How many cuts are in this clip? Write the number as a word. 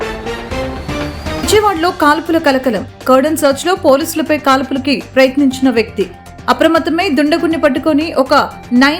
one